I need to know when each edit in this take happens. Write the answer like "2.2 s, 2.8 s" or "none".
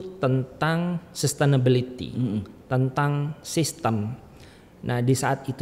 none